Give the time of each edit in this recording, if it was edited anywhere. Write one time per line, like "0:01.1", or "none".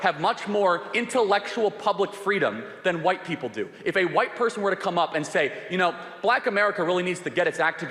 none